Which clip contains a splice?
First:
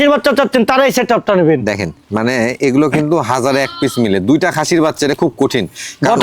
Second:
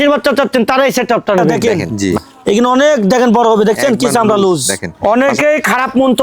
second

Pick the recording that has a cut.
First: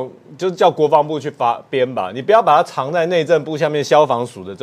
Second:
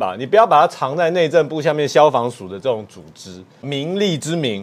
second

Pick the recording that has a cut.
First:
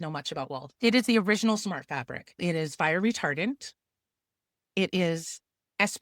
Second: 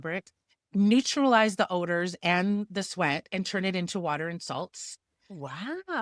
first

